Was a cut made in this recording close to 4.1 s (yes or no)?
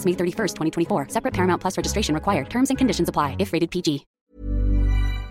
yes